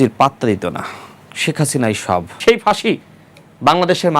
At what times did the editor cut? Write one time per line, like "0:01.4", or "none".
0:02.4